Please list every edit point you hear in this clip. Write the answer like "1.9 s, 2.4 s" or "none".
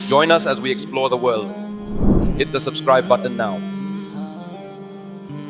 none